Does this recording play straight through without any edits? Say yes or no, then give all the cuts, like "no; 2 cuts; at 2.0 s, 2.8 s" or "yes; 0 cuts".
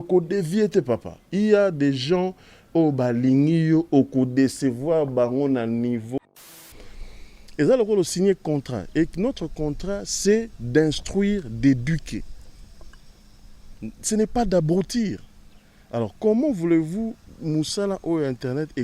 no; 1 cut; at 6.6 s